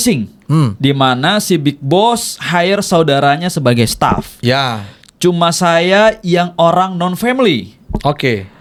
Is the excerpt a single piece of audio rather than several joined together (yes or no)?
yes